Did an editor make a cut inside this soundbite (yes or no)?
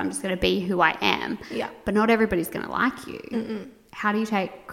no